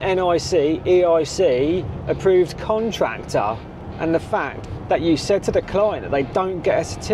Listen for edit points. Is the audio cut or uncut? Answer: uncut